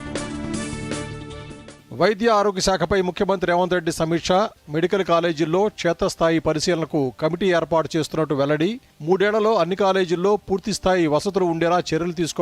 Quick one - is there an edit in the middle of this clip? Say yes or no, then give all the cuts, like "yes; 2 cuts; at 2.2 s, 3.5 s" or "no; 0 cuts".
yes; 1 cut; at 1.6 s